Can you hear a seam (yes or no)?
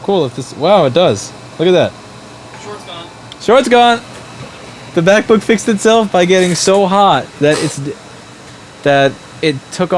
no